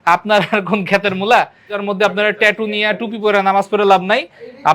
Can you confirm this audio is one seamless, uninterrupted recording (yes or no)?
no